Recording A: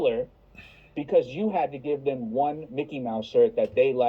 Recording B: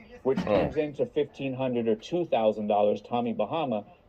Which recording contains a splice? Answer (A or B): B